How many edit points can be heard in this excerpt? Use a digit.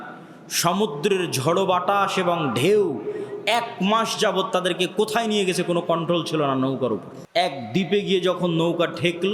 1